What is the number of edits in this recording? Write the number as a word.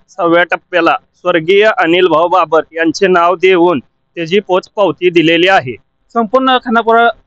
one